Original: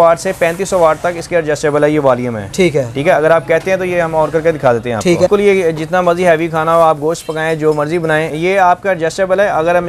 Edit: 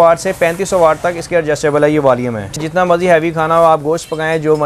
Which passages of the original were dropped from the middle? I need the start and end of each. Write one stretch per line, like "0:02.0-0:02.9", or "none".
0:02.6-0:05.7